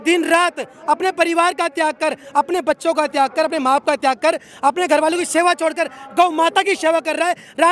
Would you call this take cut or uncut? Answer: uncut